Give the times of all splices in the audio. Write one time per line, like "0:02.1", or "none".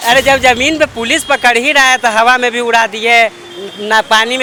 none

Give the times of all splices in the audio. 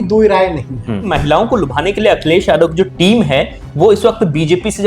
0:01.1

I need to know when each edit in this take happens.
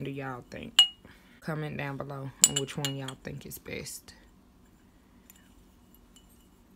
0:01.4

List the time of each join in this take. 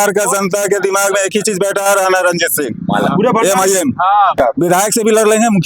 0:04.4

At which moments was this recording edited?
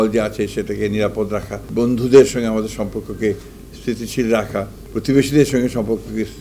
0:01.7
0:04.8

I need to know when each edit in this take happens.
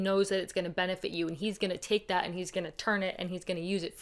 none

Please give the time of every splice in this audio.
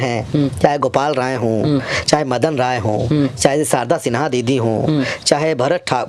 none

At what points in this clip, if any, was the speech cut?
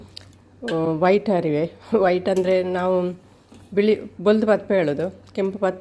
none

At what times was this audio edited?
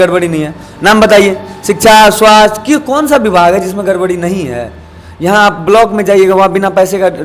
none

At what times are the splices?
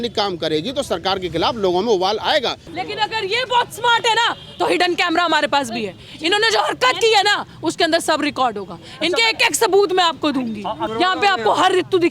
0:02.6
0:10.8

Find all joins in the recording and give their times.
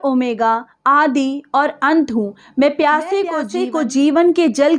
0:03.6

